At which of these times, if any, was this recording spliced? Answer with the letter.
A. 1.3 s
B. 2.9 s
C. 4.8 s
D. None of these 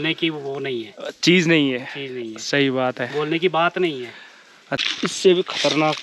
C